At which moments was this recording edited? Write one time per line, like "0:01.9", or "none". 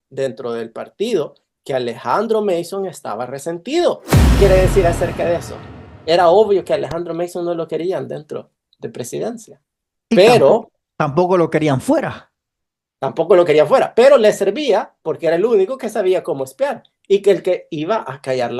0:04.4